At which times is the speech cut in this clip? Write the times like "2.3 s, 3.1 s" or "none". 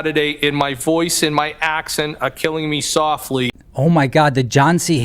3.6 s